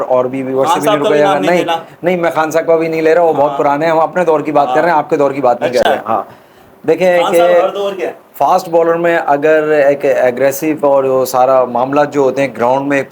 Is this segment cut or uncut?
uncut